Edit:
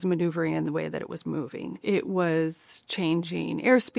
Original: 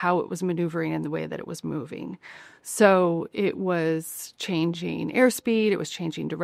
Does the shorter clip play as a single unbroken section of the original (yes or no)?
no